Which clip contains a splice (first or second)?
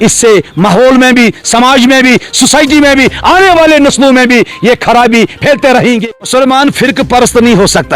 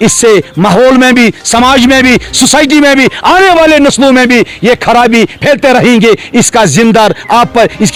first